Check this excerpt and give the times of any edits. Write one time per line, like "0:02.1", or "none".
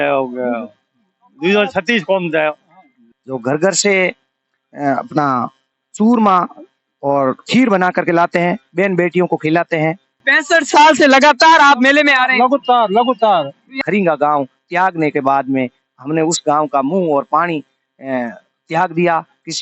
0:03.0
0:10.3
0:13.8